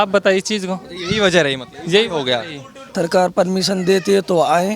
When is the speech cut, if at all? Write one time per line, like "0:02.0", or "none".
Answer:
0:02.9